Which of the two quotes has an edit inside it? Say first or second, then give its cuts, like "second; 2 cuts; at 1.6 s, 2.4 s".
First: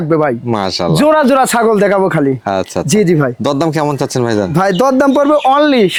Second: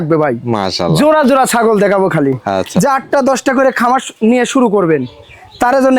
second; 1 cut; at 2.7 s